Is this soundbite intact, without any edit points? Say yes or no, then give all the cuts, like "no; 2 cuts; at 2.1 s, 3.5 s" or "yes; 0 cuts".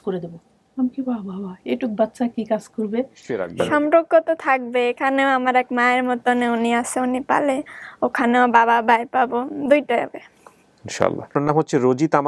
no; 2 cuts; at 3.5 s, 11.3 s